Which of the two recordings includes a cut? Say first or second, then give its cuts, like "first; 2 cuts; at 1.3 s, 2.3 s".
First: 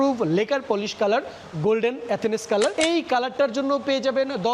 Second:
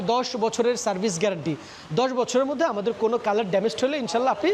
first; 1 cut; at 2.7 s